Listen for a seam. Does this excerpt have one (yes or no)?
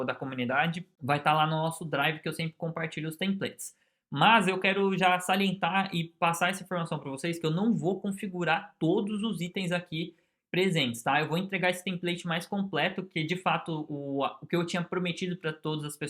no